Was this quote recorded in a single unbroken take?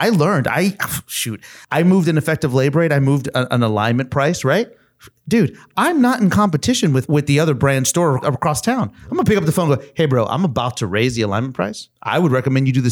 no; 4 cuts; at 1.5 s, 7.1 s, 8.2 s, 11.9 s

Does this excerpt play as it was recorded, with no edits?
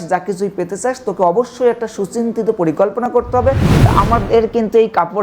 no; 1 cut; at 3.7 s

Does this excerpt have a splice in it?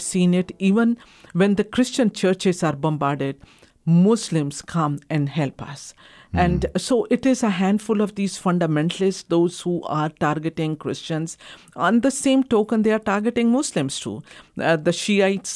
no; 0 cuts

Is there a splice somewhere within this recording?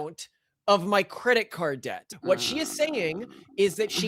yes; 1 cut; at 1.9 s

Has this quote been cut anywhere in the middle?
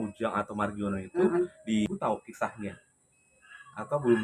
yes; 1 cut; at 1.9 s

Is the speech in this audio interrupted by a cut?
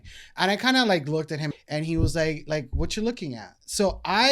yes; 1 cut; at 1.5 s

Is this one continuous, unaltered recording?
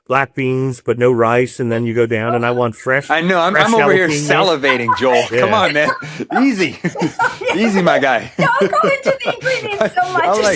yes; 0 cuts

